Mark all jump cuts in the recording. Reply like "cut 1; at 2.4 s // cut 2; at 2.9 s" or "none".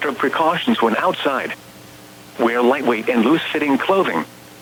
none